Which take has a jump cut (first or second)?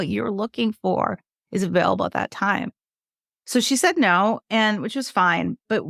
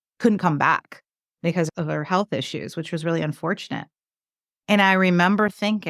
second